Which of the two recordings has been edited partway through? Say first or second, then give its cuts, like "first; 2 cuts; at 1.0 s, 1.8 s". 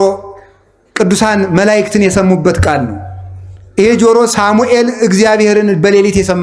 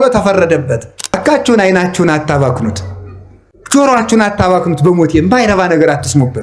second; 1 cut; at 1.2 s